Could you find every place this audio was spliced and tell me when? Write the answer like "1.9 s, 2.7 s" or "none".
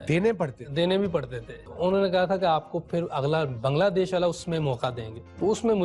1.7 s